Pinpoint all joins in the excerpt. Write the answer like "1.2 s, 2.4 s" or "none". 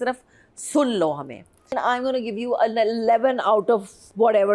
1.7 s

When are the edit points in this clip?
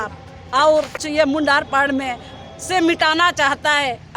1.0 s

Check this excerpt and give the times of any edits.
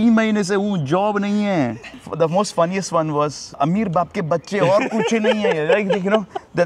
1.8 s, 3.5 s

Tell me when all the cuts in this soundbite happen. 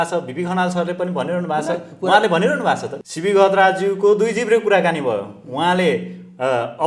2.9 s

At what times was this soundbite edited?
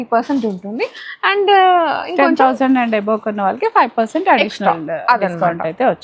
none

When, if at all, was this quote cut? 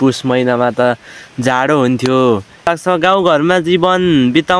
2.7 s

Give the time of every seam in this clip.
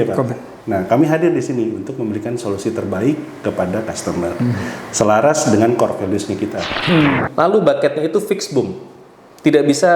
6.7 s

